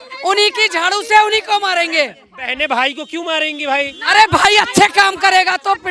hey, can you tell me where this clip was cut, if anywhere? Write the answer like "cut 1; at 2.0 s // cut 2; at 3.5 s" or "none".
none